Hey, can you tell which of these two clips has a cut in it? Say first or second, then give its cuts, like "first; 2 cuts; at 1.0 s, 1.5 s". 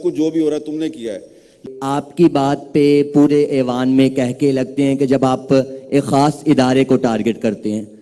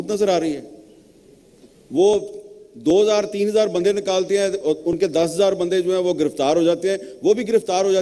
first; 1 cut; at 1.6 s